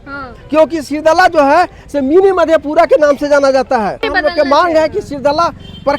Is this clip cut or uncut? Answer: cut